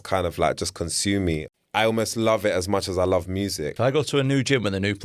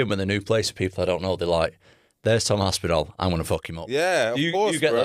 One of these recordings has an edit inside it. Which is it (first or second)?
first